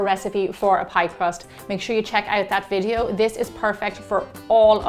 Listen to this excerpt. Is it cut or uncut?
uncut